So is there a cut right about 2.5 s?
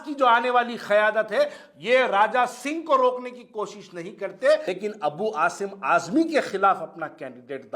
no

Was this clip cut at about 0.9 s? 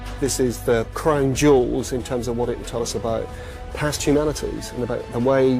yes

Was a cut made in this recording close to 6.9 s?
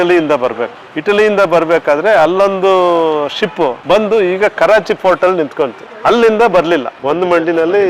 yes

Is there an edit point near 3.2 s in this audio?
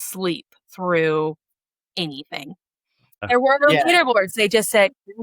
yes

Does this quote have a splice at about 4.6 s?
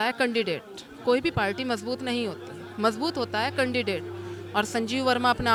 no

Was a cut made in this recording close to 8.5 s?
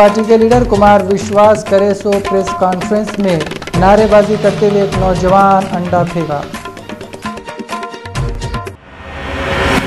yes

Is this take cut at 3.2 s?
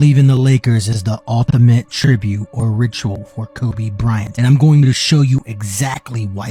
no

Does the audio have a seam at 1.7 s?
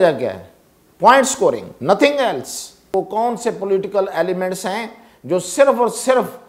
no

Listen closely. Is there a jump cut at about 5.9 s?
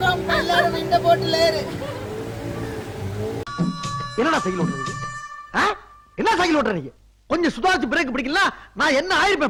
no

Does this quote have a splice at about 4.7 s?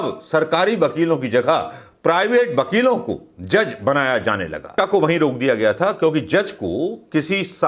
yes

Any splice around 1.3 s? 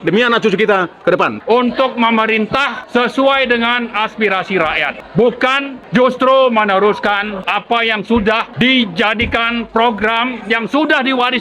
yes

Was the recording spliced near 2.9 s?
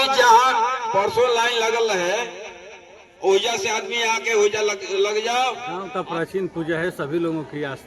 no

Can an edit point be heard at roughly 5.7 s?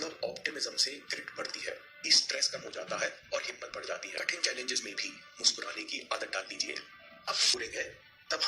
no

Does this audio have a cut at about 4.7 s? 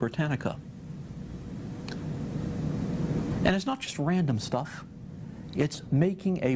yes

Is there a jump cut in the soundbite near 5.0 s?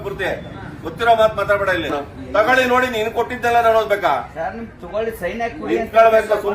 no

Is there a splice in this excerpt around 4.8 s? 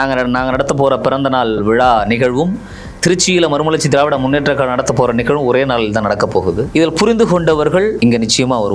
no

